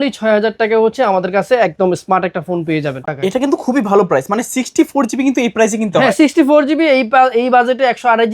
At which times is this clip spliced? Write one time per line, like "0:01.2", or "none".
0:03.1